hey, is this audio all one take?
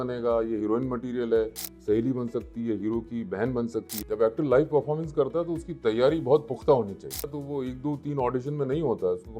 no; 3 cuts; at 1.7 s, 4.0 s, 7.4 s

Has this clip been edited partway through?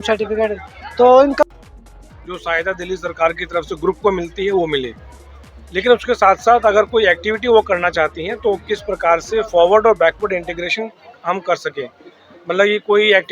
yes; 1 cut; at 1.5 s

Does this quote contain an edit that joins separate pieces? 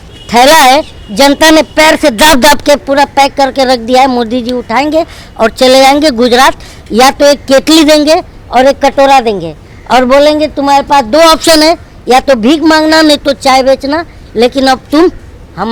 no; 0 cuts

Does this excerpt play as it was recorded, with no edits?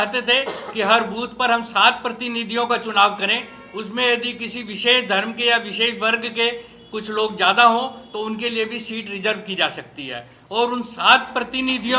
yes; 0 cuts

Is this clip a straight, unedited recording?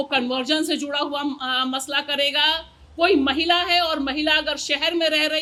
yes; 0 cuts

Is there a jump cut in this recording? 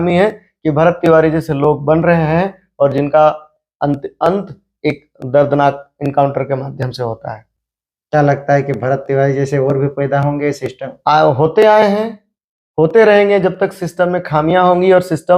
no; 0 cuts

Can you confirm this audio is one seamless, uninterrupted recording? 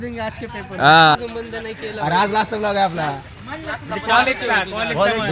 no; 1 cut; at 1.2 s

